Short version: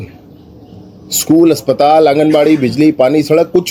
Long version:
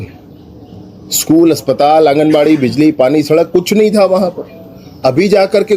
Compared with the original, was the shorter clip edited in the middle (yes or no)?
no